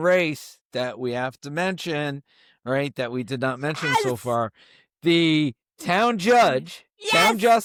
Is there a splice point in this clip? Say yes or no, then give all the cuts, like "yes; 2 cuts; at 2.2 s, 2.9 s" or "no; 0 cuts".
no; 0 cuts